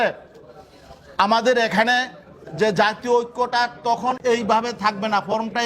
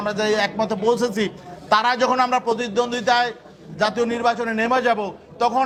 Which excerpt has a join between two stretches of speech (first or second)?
first